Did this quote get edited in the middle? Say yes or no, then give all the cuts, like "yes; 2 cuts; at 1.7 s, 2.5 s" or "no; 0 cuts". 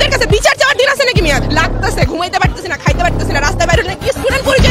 no; 0 cuts